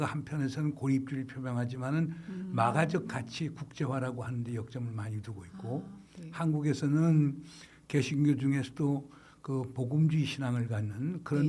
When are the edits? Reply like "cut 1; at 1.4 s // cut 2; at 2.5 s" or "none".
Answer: none